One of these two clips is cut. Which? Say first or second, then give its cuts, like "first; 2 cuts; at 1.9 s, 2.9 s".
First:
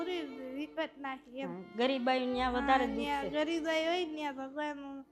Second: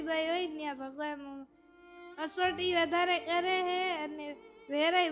first; 1 cut; at 1.7 s